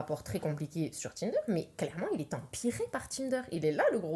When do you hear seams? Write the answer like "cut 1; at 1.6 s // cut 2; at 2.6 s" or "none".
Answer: none